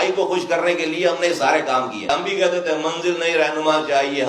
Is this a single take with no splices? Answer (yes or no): no